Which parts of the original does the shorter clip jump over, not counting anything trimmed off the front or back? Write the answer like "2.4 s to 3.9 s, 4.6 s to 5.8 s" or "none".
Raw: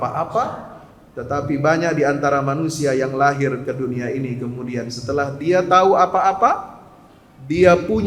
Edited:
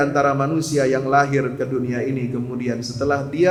none